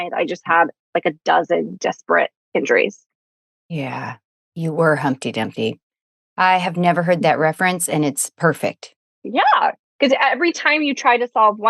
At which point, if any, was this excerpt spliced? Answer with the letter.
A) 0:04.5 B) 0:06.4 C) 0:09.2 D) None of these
C